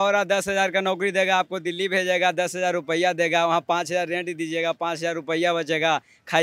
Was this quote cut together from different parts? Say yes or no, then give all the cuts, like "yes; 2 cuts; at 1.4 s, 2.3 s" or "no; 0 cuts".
no; 0 cuts